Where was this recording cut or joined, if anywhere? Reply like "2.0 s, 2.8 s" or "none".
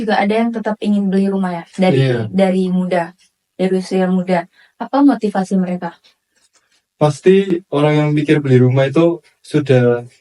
none